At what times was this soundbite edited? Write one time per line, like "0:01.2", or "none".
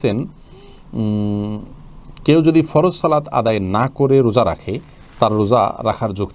none